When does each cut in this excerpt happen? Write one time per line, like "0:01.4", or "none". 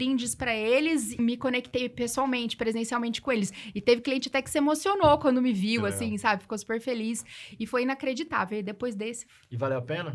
0:01.1